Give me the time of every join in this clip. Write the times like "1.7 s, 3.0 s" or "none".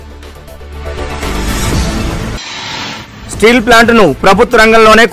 2.2 s, 2.9 s

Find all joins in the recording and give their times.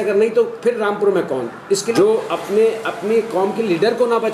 1.9 s

